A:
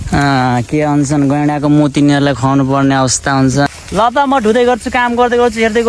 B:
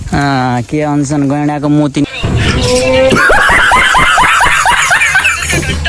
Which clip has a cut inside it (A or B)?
A